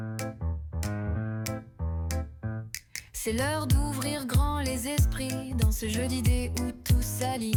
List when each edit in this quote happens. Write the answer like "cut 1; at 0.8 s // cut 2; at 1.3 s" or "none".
none